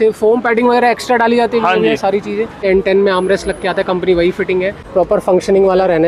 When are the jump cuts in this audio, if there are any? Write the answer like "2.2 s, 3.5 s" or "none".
2.6 s, 4.9 s